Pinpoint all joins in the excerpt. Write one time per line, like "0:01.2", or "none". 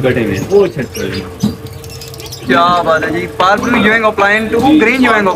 none